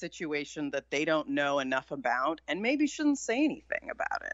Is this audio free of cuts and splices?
yes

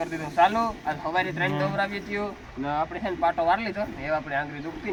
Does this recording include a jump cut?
no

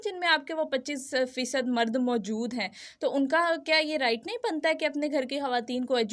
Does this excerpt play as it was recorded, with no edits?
yes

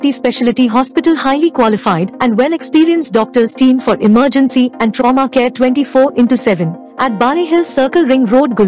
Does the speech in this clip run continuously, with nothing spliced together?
yes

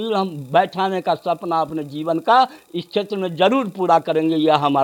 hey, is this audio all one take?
yes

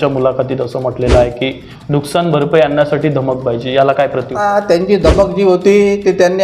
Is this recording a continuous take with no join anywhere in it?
no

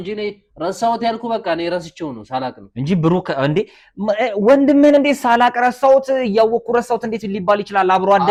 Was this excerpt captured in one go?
yes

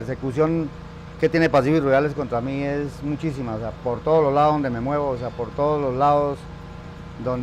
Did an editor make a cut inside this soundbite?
no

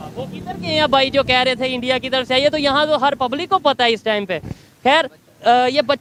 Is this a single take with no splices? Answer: yes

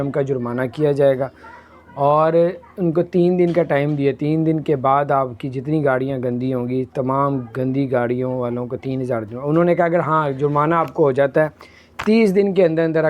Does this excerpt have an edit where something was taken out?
no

